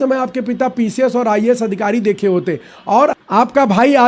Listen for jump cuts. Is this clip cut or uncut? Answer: cut